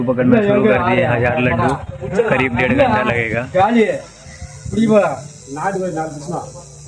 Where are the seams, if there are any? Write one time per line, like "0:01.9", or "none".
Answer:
none